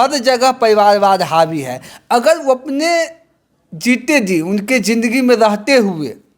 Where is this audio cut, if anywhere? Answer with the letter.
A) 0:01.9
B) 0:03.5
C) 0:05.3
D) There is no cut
A